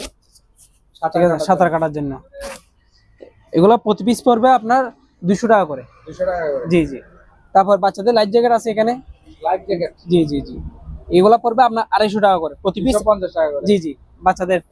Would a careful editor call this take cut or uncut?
uncut